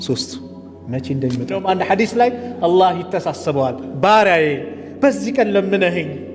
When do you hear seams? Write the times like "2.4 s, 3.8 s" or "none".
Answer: 1.6 s